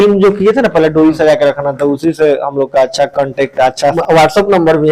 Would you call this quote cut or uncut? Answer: cut